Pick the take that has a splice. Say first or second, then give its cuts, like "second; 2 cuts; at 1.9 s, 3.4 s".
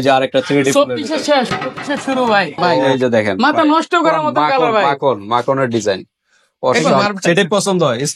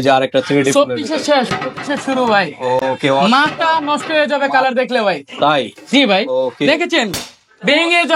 first; 2 cuts; at 2.7 s, 7.0 s